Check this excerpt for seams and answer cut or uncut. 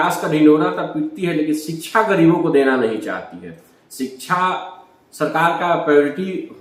uncut